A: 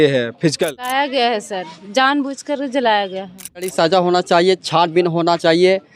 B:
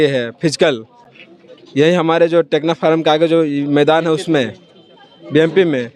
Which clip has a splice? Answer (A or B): A